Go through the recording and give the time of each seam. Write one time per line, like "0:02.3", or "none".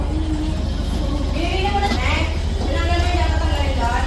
0:02.0